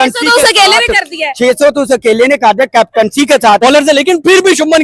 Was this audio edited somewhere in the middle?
yes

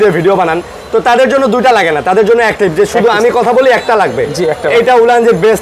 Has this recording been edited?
no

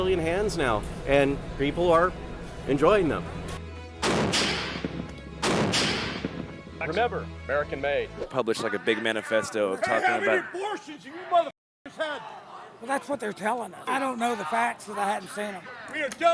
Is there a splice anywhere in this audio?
yes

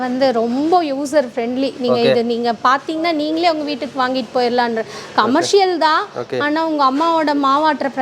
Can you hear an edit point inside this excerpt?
no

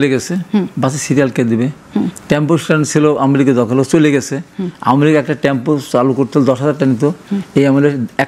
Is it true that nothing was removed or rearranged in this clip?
yes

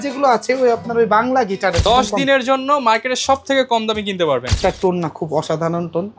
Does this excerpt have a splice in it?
yes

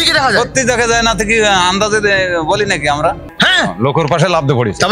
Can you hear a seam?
yes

